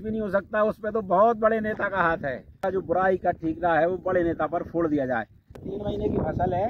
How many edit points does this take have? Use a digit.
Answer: 2